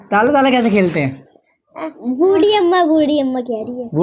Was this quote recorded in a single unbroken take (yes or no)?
yes